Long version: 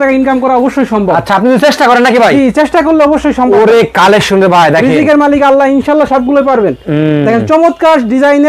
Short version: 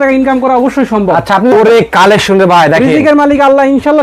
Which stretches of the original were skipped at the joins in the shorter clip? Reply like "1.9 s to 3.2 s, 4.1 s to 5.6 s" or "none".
1.5 s to 3.5 s